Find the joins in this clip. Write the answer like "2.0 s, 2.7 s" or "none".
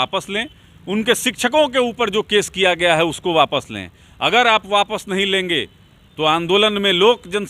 none